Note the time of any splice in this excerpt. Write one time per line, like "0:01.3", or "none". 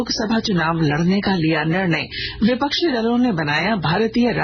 none